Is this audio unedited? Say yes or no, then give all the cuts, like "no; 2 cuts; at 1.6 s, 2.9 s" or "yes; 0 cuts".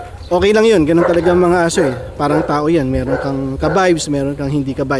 yes; 0 cuts